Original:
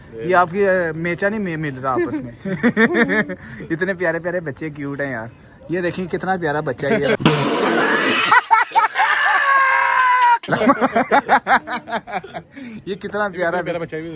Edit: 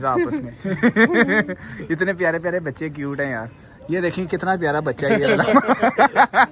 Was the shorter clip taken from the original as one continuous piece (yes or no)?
no